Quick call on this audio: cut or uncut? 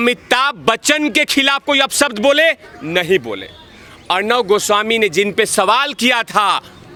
uncut